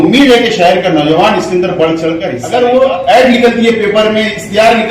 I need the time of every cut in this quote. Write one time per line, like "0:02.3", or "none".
0:02.3

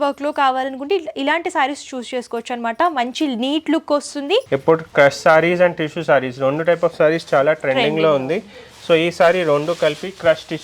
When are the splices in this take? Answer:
0:04.5

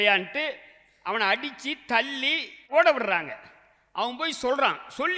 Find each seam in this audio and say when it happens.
0:02.6

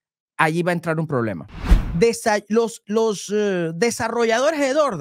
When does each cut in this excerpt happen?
0:01.4

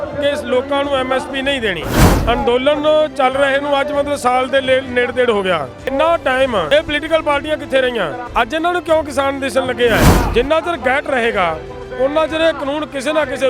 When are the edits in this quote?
0:02.1
0:05.9
0:06.7
0:08.2
0:10.2

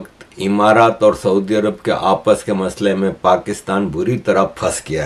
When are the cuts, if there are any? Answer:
none

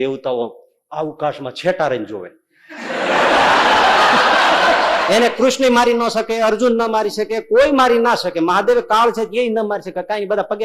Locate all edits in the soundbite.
0:05.0

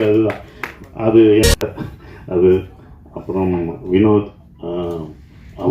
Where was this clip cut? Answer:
0:01.5

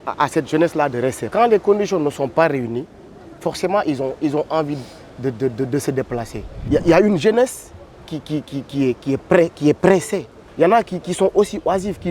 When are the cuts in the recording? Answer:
0:01.2
0:06.6

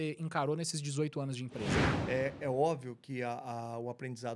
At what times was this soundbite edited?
0:01.9

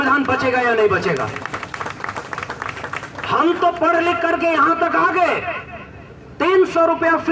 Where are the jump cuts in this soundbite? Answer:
none

